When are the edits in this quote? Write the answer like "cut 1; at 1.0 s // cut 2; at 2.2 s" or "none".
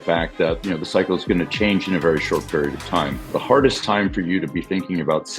cut 1; at 3.3 s

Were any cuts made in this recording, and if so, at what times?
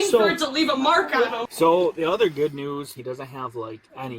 cut 1; at 1.4 s // cut 2; at 3.0 s

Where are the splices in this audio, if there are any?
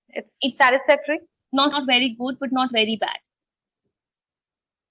cut 1; at 1.7 s

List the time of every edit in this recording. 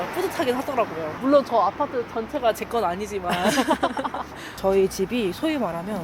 cut 1; at 4.4 s

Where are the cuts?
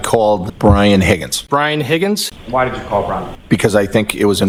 none

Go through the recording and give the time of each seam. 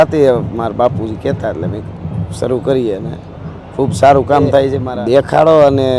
cut 1; at 4.8 s

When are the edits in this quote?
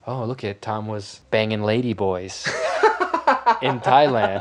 cut 1; at 1.1 s

